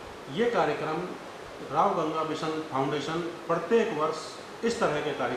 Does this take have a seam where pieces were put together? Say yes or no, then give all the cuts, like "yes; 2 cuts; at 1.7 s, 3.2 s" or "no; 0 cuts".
no; 0 cuts